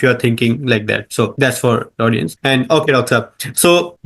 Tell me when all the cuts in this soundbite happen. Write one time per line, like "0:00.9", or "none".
none